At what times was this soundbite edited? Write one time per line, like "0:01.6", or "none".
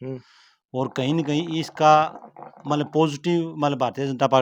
none

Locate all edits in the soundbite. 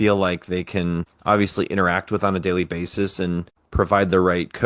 0:01.1
0:03.6

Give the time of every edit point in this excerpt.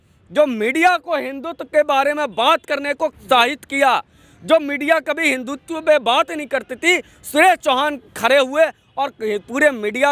0:03.2

